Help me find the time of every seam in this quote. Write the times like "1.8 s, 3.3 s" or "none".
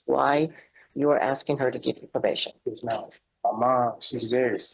3.2 s